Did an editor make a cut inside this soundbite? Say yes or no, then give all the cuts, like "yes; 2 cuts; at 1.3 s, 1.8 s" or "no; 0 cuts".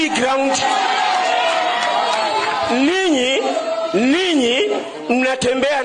no; 0 cuts